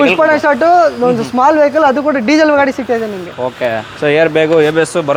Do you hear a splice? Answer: no; 0 cuts

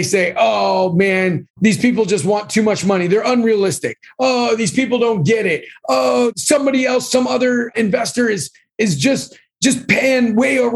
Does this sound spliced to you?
yes; 1 cut; at 6.3 s

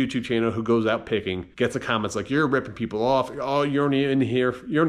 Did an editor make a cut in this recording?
no; 0 cuts

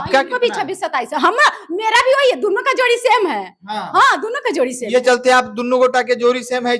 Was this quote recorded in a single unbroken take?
yes; 0 cuts

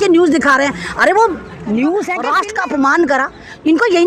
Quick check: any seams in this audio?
yes; 1 cut; at 2.2 s

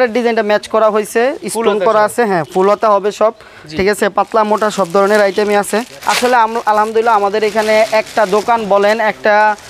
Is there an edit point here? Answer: no; 0 cuts

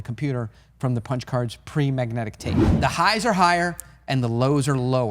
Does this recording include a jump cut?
yes; 1 cut; at 2.7 s

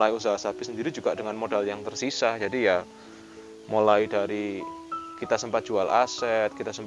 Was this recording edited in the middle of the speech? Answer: no; 0 cuts

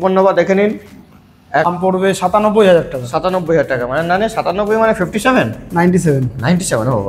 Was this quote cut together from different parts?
yes; 1 cut; at 1.7 s

